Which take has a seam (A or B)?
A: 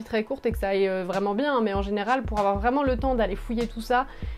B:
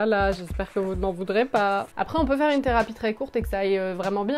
B